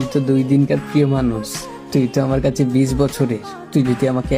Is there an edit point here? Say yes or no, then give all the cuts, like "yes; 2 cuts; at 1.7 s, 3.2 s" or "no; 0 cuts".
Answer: no; 0 cuts